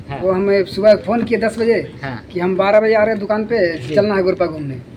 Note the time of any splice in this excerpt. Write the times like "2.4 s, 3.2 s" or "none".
none